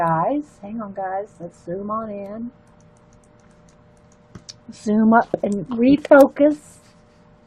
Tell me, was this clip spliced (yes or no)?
no